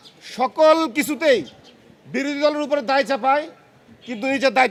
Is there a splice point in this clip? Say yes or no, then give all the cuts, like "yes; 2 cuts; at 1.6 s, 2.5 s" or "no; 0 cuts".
no; 0 cuts